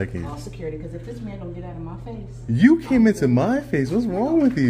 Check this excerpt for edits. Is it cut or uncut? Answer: uncut